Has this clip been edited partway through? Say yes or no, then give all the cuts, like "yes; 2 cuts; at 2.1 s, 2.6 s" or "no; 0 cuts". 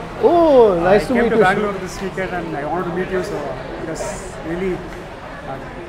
no; 0 cuts